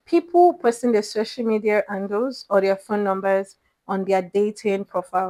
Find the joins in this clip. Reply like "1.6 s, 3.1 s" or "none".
none